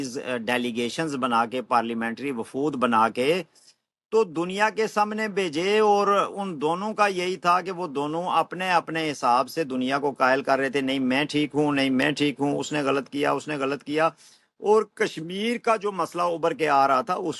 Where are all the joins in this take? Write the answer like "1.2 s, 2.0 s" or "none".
none